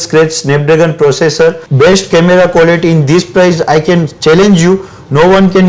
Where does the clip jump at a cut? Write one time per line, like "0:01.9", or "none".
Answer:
0:01.6